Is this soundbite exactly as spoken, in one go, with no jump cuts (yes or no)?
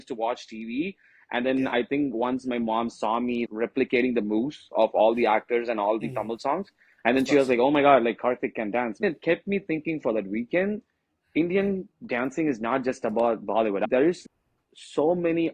no